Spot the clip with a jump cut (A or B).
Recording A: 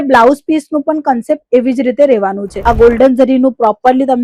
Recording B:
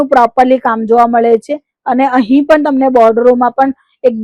A